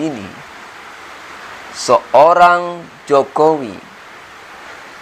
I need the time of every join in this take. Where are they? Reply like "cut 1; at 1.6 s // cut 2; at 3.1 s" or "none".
none